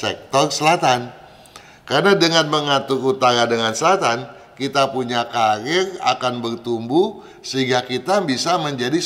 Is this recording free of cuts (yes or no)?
yes